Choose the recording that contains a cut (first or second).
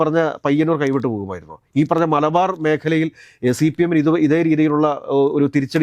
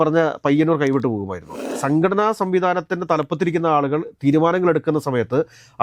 second